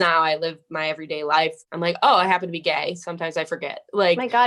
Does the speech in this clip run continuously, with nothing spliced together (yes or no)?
no